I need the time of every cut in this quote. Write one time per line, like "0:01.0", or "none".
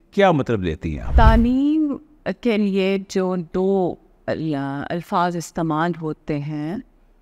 0:01.1